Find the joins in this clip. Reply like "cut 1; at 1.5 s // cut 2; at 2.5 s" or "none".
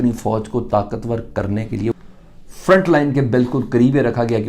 cut 1; at 1.9 s